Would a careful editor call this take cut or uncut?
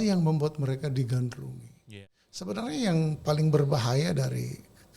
cut